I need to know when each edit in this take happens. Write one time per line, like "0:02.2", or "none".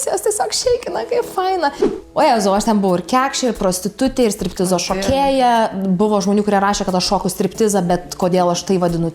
0:01.8

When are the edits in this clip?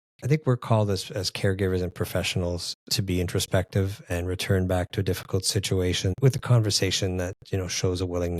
0:06.1

